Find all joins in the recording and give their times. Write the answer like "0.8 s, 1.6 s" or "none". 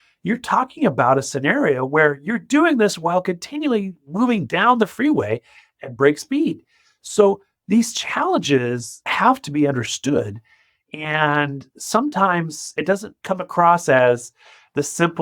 none